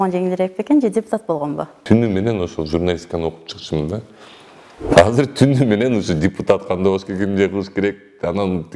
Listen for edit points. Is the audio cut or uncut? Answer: cut